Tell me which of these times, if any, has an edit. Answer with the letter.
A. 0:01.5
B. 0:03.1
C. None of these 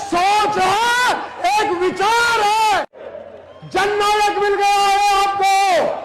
B